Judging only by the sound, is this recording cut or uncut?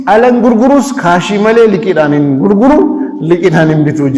uncut